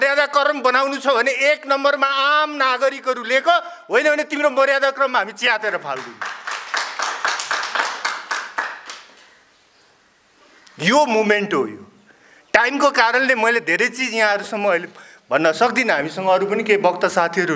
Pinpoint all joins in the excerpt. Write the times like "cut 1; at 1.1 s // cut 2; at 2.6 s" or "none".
none